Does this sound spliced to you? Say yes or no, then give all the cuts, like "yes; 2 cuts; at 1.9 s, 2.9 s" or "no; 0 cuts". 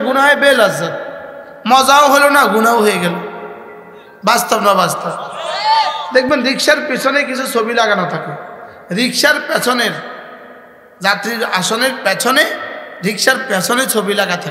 no; 0 cuts